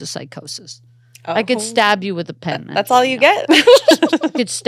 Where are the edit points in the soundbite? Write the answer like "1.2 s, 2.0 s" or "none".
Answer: none